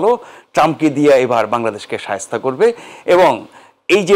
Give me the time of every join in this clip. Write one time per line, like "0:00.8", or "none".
none